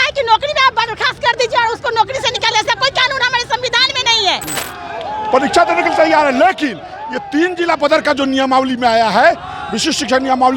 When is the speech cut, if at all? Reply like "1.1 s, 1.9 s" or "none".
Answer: 4.6 s